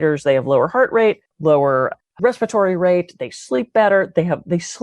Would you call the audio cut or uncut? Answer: cut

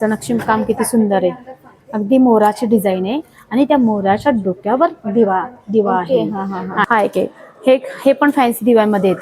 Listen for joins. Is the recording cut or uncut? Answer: cut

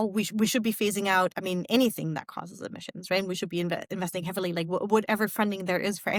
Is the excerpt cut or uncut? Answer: uncut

